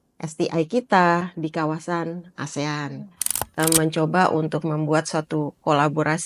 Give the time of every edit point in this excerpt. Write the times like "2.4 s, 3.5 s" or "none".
3.5 s